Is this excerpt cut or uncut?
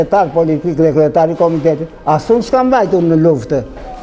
uncut